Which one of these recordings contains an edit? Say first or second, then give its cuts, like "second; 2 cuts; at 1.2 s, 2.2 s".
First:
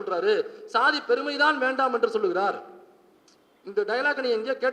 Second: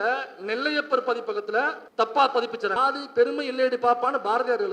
second; 2 cuts; at 1.8 s, 2.8 s